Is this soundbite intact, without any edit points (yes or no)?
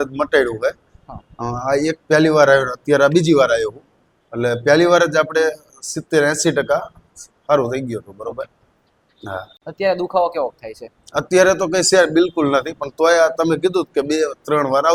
yes